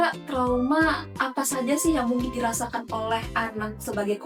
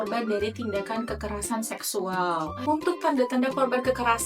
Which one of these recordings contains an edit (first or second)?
second